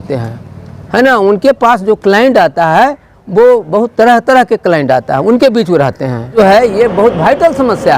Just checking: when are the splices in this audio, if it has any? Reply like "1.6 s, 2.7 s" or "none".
6.3 s